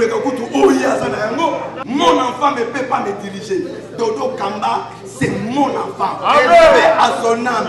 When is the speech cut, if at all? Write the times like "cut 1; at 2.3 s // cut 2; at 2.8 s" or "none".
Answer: cut 1; at 1.7 s